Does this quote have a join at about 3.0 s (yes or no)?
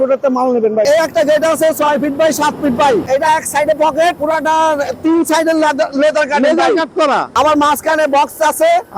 yes